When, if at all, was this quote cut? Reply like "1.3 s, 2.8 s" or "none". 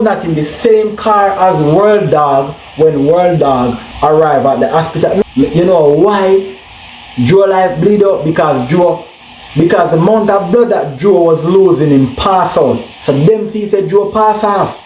3.9 s, 5.2 s